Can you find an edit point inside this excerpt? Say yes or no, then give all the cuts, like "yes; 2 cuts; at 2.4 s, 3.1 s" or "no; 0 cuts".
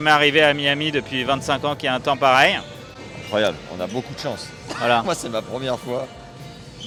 no; 0 cuts